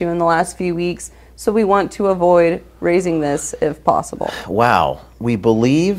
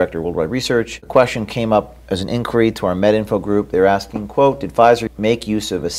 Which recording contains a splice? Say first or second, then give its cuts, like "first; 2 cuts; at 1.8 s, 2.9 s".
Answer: second; 2 cuts; at 1.0 s, 5.1 s